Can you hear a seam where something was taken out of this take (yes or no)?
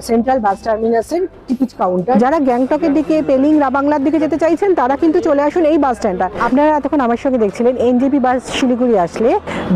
yes